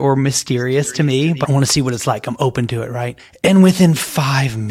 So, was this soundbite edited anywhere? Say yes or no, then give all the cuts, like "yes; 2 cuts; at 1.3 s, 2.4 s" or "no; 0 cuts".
yes; 2 cuts; at 1.4 s, 3.2 s